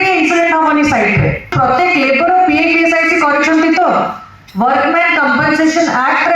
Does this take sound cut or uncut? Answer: cut